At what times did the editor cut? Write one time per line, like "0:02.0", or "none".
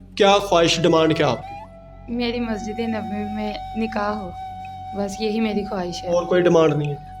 none